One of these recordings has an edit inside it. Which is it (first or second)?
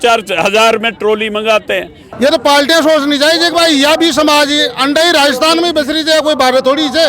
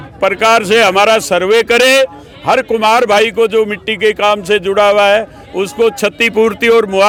first